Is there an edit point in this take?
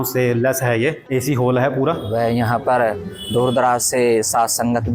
yes; 2 cuts; at 1.0 s, 2.0 s

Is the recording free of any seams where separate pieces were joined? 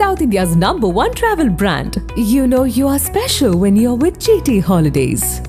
yes; 0 cuts

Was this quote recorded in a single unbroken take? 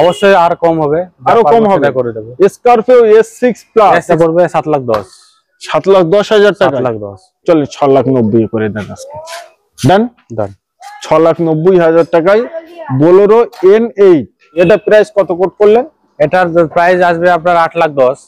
no; 2 cuts; at 4.1 s, 14.6 s

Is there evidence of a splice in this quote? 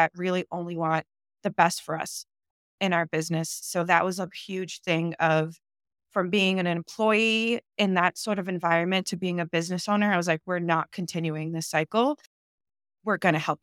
no; 0 cuts

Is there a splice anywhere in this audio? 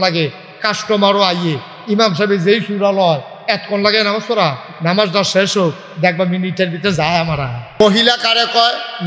yes; 1 cut; at 7.8 s

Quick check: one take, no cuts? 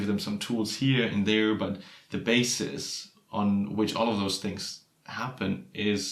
yes; 0 cuts

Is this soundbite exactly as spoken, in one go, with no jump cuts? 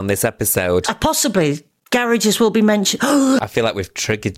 no; 1 cut; at 3.4 s

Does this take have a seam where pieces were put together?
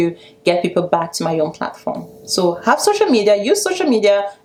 no; 0 cuts

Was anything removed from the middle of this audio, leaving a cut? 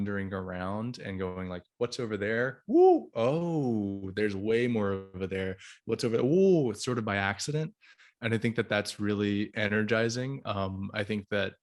no; 0 cuts

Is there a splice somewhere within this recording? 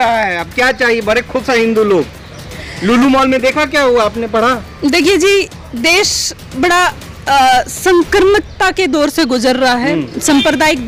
no; 0 cuts

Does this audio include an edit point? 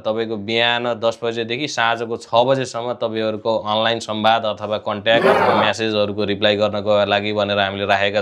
no; 0 cuts

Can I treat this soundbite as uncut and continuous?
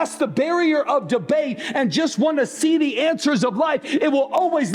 yes; 0 cuts

